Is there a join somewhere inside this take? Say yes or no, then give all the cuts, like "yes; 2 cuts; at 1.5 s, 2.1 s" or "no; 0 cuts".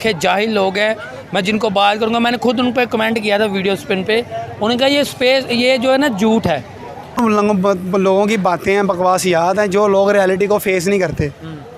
yes; 1 cut; at 7.2 s